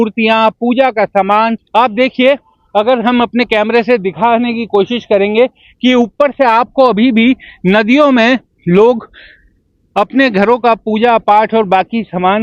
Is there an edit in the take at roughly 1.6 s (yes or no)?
yes